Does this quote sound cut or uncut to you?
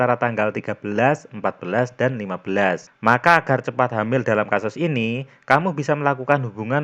cut